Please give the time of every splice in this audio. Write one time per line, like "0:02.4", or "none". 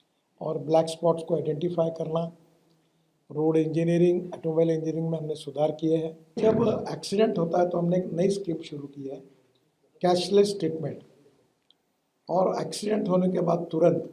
0:06.4